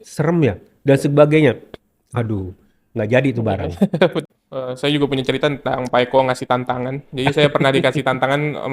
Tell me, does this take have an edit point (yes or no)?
yes